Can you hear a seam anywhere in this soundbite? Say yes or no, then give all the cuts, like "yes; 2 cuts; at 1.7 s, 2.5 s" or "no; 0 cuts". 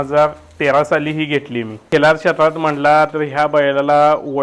yes; 1 cut; at 1.8 s